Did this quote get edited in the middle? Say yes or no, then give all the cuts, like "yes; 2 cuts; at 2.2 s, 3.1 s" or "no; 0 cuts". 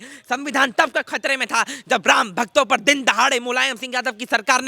no; 0 cuts